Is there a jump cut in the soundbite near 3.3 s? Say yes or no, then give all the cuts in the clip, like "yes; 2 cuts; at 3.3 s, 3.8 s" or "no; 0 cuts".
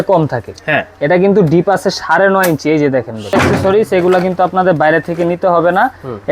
yes; 1 cut; at 3.3 s